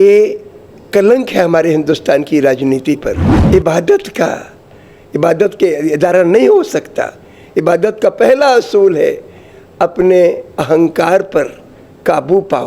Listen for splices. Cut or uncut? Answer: cut